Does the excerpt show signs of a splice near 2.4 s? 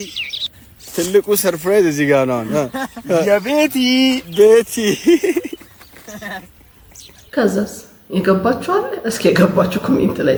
no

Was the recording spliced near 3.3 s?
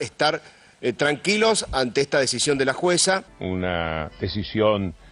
yes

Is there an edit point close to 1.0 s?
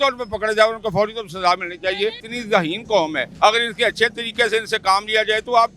no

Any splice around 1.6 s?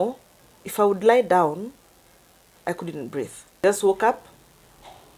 no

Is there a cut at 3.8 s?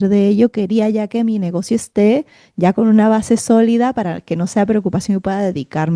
no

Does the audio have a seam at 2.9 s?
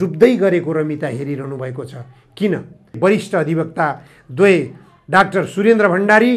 yes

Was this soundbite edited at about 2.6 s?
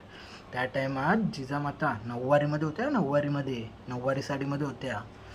no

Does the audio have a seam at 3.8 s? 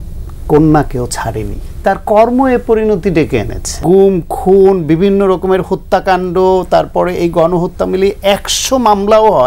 yes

